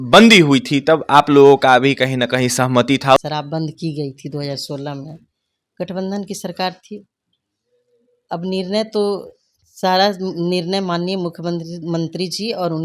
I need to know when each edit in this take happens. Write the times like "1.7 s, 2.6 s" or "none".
3.2 s